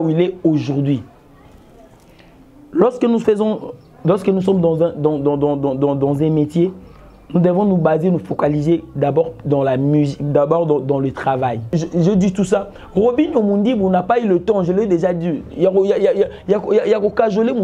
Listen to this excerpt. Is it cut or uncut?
cut